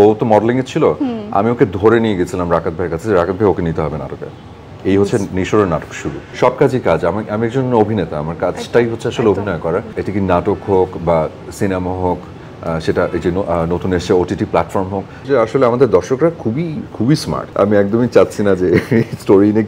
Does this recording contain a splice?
yes; 4 cuts; at 6.2 s, 10.0 s, 15.1 s, 17.4 s

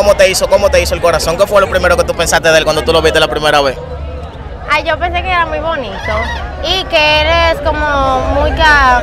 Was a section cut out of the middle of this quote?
no; 0 cuts

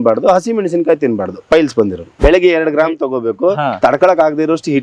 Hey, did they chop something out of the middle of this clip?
yes; 2 cuts; at 2.1 s, 3.7 s

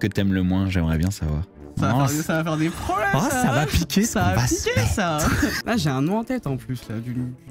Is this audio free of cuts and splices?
no; 2 cuts; at 1.6 s, 5.7 s

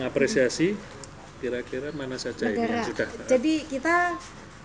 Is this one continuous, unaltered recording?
yes; 0 cuts

